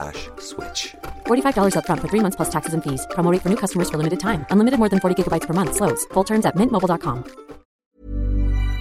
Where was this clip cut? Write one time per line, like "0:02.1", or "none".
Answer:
0:07.9